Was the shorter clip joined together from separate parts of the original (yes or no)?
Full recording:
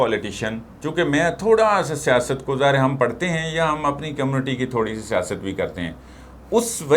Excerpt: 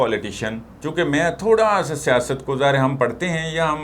no